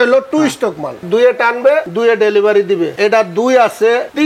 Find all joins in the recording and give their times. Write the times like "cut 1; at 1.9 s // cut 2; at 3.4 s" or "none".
cut 1; at 1.0 s